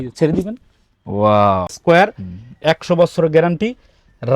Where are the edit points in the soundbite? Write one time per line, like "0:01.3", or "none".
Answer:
0:01.8